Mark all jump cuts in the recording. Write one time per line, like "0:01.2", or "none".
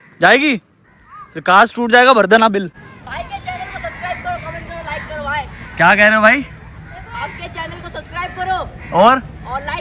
none